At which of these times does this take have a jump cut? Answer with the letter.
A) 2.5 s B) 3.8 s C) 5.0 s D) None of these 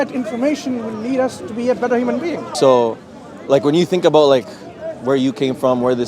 A